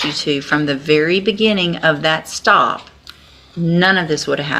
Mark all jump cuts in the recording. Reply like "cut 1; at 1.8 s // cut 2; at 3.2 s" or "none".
none